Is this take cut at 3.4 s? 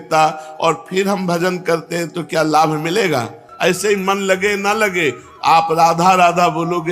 yes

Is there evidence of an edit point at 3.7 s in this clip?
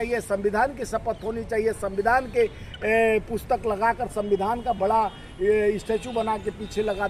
no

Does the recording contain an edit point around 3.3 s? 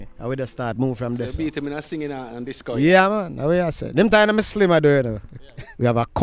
no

